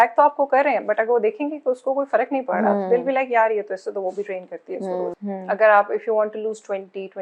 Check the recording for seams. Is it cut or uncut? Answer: cut